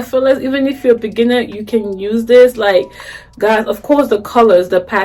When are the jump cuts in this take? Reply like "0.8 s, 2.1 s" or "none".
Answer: none